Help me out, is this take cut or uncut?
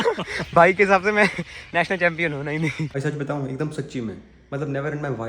cut